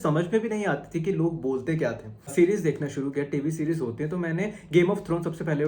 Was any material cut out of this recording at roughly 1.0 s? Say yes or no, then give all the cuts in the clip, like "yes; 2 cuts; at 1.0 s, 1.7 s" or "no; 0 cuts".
no; 1 cut; at 2.3 s